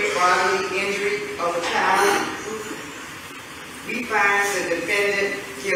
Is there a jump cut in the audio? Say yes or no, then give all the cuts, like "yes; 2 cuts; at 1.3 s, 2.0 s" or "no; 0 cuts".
yes; 1 cut; at 3.6 s